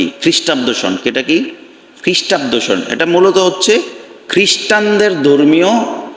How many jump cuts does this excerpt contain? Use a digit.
0